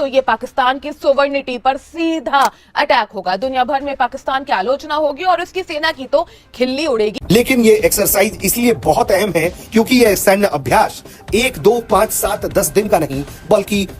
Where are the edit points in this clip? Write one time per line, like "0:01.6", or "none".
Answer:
0:07.2